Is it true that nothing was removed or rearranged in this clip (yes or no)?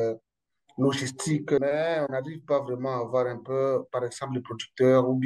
no